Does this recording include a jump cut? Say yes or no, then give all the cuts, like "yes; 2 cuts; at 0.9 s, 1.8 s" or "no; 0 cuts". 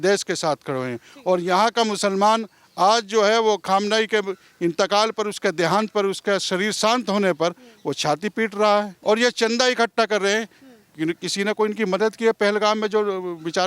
yes; 1 cut; at 8.9 s